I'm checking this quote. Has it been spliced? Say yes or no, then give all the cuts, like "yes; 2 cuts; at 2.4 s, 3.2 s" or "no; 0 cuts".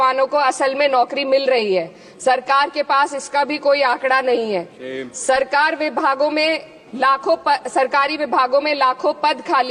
no; 0 cuts